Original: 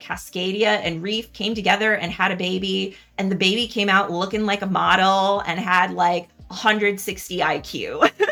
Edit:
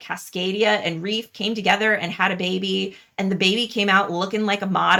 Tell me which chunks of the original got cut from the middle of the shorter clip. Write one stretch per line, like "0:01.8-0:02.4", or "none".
none

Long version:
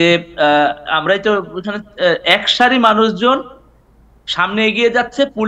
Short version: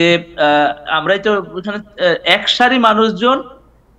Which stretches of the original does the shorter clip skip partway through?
none

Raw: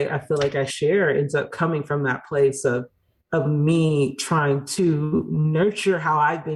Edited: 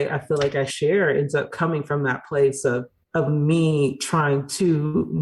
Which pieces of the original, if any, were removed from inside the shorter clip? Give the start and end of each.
0:03.0-0:03.1

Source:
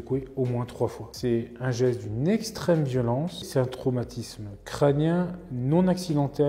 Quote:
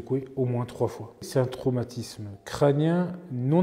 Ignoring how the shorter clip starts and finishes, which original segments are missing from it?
0:01.1-0:03.3

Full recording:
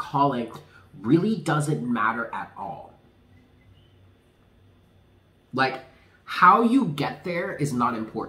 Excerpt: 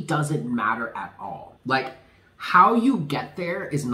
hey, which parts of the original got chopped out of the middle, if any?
0:02.9-0:05.4

